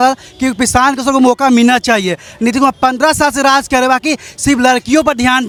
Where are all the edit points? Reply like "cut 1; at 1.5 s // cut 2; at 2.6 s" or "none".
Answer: none